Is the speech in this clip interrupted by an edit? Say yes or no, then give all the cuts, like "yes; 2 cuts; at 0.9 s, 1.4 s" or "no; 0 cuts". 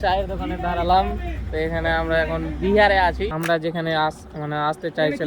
yes; 1 cut; at 3.3 s